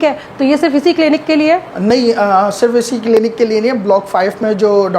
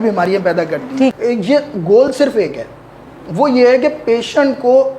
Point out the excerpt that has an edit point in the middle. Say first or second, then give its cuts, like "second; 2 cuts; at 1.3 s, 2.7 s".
second; 1 cut; at 1.2 s